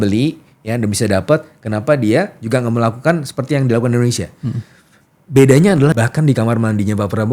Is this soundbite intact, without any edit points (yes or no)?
no